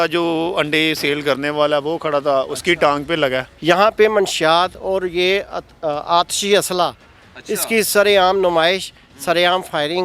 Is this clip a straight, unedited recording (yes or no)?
no